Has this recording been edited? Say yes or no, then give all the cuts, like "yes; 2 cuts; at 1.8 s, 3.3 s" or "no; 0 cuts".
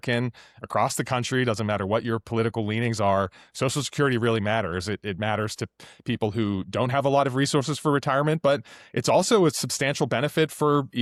no; 0 cuts